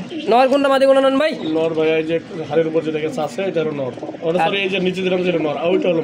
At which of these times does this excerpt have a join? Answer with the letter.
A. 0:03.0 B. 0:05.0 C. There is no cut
C